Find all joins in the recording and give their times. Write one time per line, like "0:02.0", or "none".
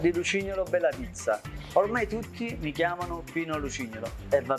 none